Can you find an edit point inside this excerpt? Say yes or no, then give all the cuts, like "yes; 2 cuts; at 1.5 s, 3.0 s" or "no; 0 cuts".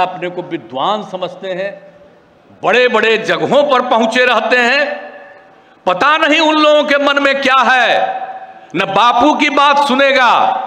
no; 0 cuts